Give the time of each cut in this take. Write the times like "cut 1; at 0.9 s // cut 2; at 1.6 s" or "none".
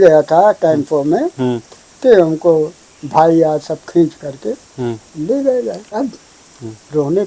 cut 1; at 6.0 s